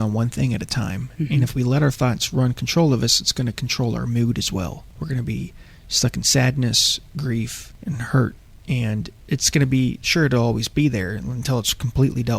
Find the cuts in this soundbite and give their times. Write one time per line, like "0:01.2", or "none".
0:04.9
0:07.7